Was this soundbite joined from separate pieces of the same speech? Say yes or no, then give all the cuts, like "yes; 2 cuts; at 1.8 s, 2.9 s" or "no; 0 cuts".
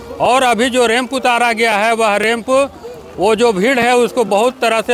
no; 0 cuts